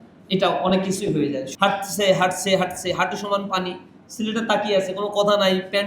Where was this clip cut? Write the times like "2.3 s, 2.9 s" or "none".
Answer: 1.5 s